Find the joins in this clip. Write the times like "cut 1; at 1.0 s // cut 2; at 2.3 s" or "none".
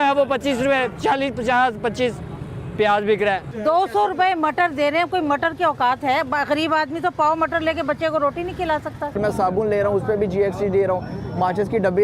cut 1; at 3.5 s // cut 2; at 9.2 s